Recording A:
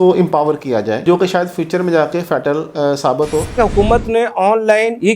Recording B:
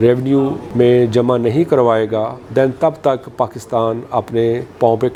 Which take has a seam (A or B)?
A